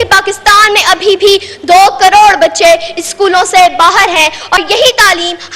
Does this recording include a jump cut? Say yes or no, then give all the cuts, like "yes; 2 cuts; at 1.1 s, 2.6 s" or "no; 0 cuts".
yes; 1 cut; at 4.6 s